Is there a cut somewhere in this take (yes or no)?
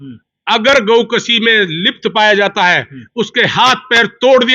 no